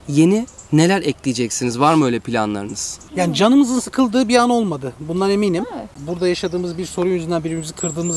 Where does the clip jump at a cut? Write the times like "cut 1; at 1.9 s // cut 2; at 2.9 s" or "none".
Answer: cut 1; at 3.0 s // cut 2; at 6.0 s